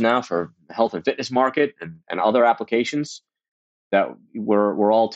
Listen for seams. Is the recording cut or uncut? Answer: uncut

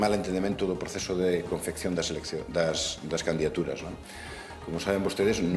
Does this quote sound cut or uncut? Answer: uncut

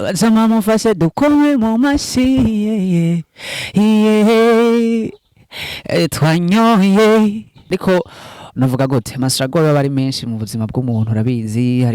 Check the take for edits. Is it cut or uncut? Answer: cut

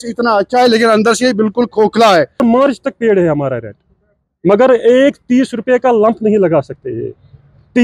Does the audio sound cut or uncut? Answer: cut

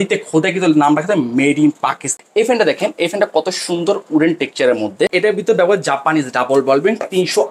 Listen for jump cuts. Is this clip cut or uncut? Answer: cut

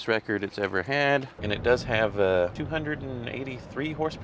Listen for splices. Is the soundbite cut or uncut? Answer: cut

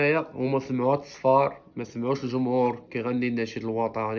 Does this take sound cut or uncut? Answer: uncut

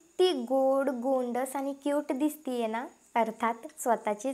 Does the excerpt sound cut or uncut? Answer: uncut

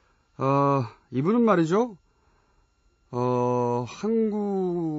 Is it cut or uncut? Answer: cut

